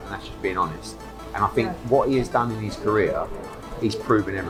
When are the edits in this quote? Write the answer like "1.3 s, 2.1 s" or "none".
none